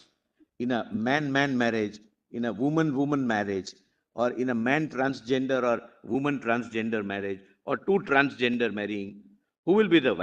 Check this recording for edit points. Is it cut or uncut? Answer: uncut